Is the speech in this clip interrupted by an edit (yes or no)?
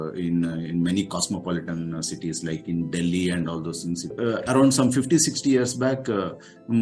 yes